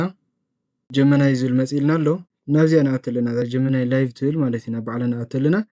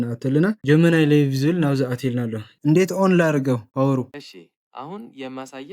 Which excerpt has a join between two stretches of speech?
second; 1 cut; at 2.4 s

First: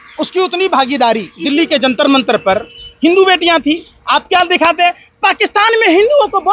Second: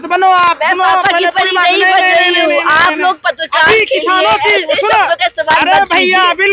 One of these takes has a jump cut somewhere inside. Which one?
first; 1 cut; at 1.3 s

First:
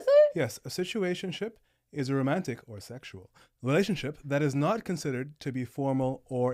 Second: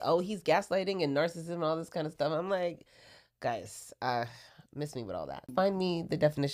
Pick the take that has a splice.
second; 1 cut; at 5.5 s

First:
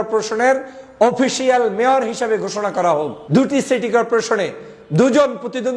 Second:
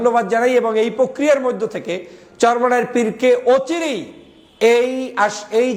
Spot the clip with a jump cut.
first; 1 cut; at 3.2 s

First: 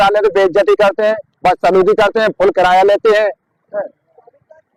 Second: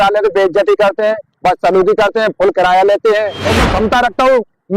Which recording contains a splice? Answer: second; 1 cut; at 3.5 s

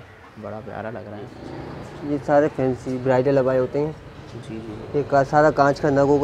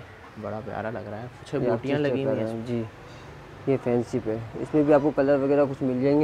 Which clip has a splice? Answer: first; 1 cut; at 1.4 s

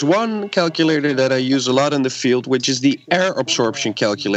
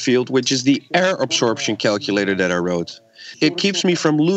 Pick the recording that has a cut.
second; 1 cut; at 3.2 s

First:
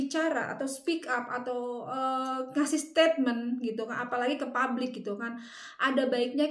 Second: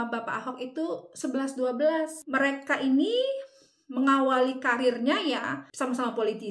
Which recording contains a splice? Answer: second; 2 cuts; at 2.2 s, 5.6 s

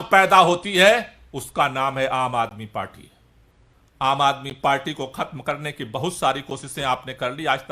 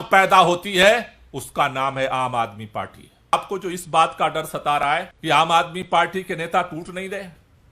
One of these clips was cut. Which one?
second; 2 cuts; at 3.3 s, 5.1 s

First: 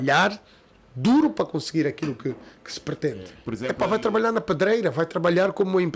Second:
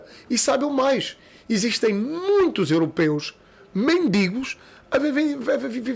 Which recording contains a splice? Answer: first; 1 cut; at 3.4 s

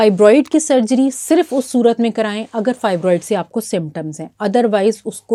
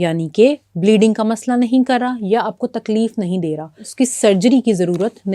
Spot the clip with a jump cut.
second; 1 cut; at 3.8 s

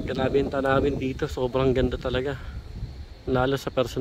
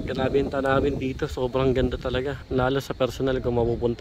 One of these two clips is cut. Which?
second; 1 cut; at 2.4 s

